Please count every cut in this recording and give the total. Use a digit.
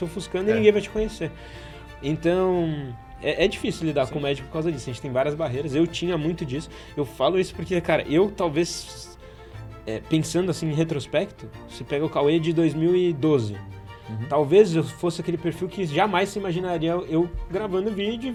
0